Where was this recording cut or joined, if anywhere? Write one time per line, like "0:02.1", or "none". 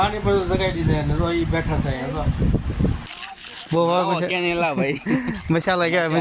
0:03.1